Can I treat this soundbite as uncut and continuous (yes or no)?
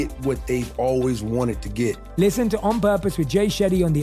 no